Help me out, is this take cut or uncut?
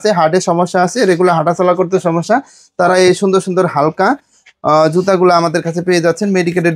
uncut